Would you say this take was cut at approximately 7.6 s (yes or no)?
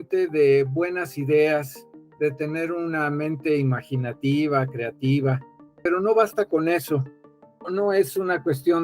yes